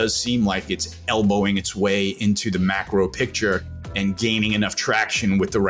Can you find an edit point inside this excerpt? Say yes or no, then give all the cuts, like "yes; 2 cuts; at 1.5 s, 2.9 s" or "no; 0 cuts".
no; 0 cuts